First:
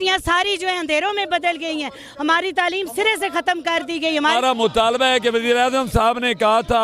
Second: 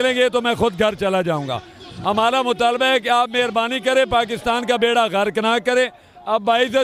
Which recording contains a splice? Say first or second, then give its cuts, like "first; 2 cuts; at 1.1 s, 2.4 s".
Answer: first; 1 cut; at 4.3 s